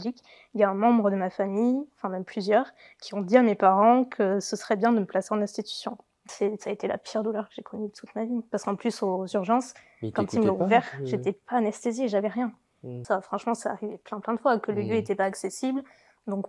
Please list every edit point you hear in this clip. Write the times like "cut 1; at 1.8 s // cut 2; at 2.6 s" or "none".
cut 1; at 6.3 s // cut 2; at 13.0 s